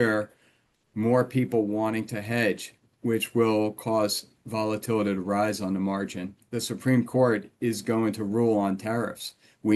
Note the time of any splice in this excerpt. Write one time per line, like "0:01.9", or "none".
0:06.4

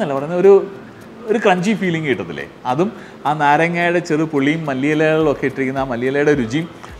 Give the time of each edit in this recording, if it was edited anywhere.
none

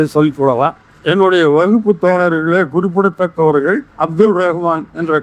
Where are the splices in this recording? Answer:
0:00.9
0:03.9

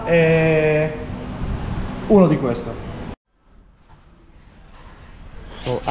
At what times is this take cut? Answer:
0:03.2

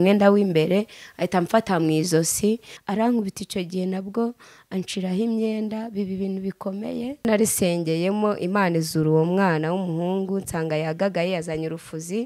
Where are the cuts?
0:02.7
0:07.2

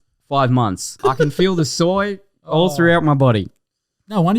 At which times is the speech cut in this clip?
0:01.0

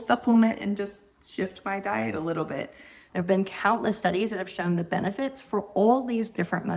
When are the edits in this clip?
0:02.9

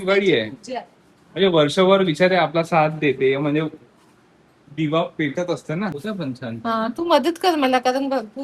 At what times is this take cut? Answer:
0:06.0

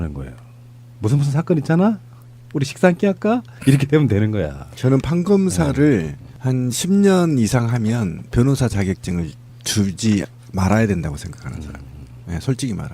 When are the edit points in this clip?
0:08.1

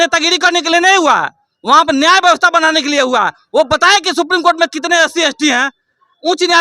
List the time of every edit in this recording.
none

